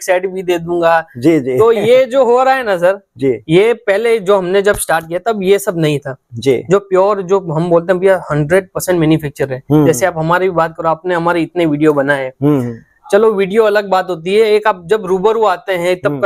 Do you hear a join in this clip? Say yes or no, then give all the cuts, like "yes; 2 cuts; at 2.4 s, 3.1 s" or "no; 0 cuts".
no; 0 cuts